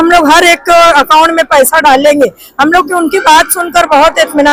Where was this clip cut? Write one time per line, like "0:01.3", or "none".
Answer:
none